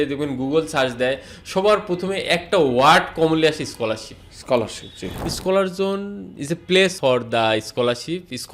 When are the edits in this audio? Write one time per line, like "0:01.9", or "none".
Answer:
0:05.2
0:07.0